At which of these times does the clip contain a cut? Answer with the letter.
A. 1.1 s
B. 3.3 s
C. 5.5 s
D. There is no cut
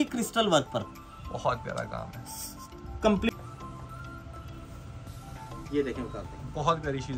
B